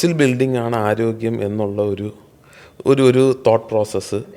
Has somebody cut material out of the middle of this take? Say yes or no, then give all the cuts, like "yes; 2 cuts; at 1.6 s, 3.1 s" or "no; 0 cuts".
no; 0 cuts